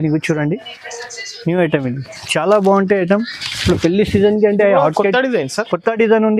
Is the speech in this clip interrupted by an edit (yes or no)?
no